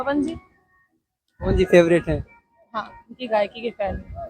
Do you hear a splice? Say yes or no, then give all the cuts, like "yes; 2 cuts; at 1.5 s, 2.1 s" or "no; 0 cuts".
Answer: no; 0 cuts